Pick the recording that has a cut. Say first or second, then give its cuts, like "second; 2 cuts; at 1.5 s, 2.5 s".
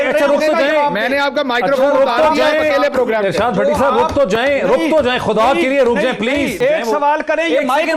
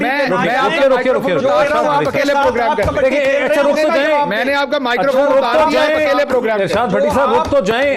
first; 1 cut; at 6.5 s